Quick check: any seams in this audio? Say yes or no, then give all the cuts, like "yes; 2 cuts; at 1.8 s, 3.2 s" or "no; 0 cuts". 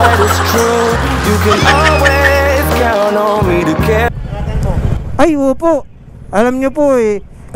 yes; 1 cut; at 4.2 s